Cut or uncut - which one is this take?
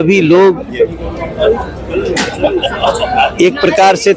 uncut